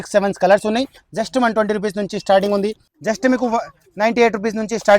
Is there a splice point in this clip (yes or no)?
yes